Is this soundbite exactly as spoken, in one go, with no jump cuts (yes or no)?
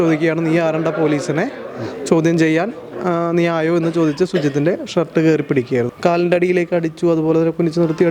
no